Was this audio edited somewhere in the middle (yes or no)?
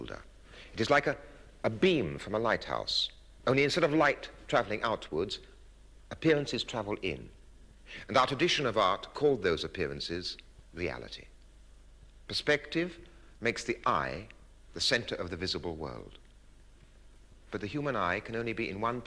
no